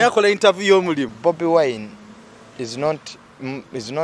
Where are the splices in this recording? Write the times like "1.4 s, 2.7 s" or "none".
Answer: 1.1 s